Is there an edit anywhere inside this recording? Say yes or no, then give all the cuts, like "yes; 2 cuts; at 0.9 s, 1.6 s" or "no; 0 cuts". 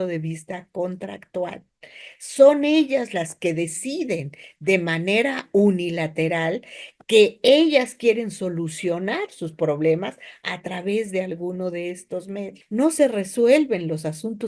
yes; 1 cut; at 12.6 s